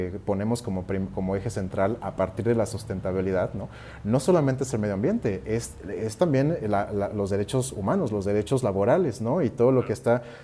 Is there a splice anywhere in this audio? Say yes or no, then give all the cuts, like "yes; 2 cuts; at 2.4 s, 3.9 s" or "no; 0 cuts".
no; 0 cuts